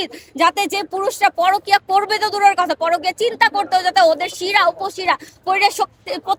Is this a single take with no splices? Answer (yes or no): yes